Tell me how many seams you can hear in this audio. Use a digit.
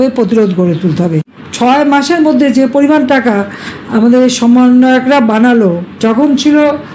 2